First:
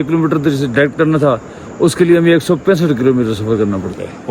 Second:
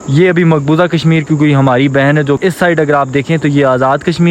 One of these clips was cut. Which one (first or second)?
second